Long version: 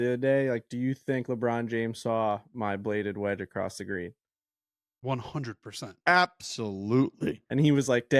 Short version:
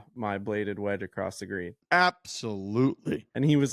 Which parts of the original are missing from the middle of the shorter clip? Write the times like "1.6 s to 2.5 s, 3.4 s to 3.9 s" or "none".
4.1 s to 5.9 s